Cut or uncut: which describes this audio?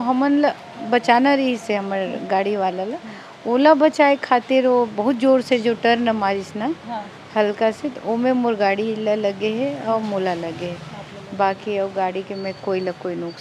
uncut